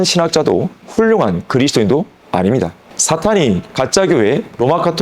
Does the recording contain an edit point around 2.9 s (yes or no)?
yes